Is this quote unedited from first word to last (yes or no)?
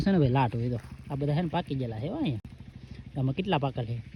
yes